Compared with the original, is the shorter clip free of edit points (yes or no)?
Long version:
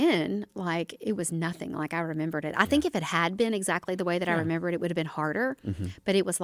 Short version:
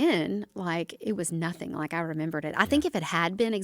yes